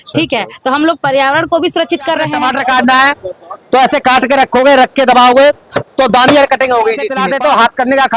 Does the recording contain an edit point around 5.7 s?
no; 2 cuts; at 2.3 s, 7.1 s

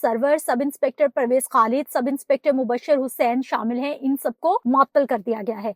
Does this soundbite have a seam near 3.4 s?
no; 1 cut; at 4.6 s

